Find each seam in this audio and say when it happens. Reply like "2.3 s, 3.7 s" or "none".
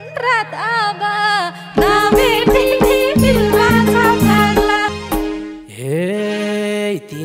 none